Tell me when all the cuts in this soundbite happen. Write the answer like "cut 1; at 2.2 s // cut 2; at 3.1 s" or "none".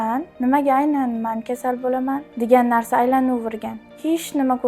cut 1; at 2.3 s

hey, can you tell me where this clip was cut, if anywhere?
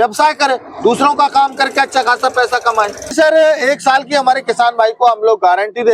cut 1; at 3.1 s

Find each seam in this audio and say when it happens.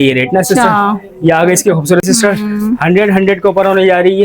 cut 1; at 2.0 s

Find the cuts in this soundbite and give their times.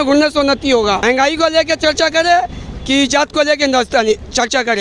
cut 1; at 1.0 s

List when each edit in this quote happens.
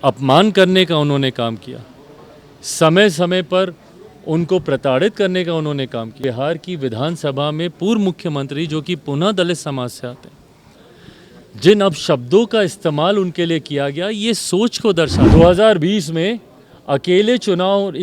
cut 1; at 6.2 s // cut 2; at 15.2 s

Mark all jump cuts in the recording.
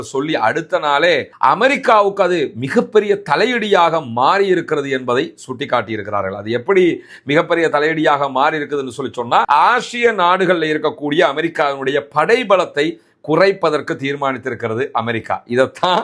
cut 1; at 9.5 s

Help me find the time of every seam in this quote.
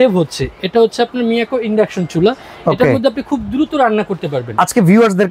none

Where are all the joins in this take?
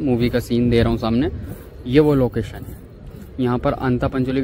none

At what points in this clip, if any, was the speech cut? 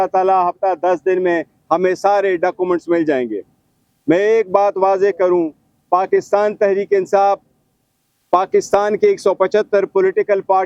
none

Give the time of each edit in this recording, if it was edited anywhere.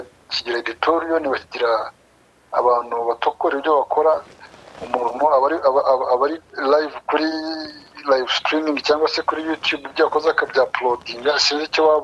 none

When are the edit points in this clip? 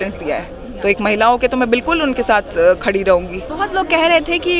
cut 1; at 3.4 s

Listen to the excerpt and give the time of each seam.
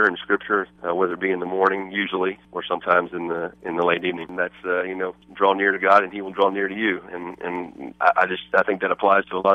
cut 1; at 4.2 s

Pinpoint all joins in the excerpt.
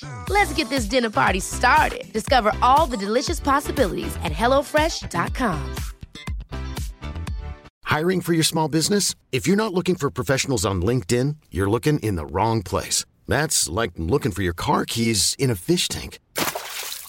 cut 1; at 7.7 s

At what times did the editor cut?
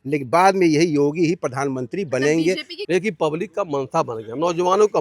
cut 1; at 2.7 s

